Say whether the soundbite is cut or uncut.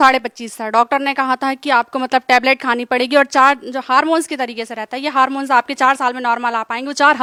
uncut